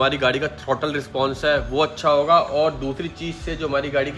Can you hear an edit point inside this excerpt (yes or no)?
no